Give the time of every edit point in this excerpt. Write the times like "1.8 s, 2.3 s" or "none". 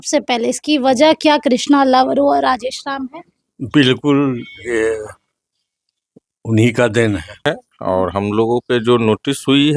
7.4 s